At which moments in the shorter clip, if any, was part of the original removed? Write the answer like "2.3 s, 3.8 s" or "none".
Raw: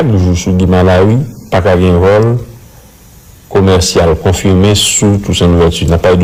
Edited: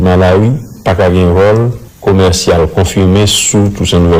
1.8 s